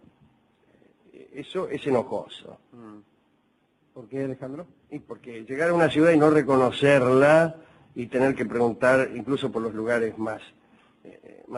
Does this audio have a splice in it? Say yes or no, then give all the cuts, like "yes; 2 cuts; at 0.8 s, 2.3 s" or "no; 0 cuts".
yes; 1 cut; at 7.2 s